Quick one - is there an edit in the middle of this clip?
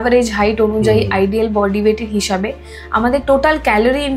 no; 0 cuts

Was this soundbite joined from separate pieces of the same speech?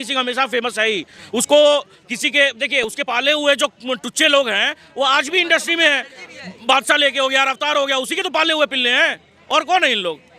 no; 0 cuts

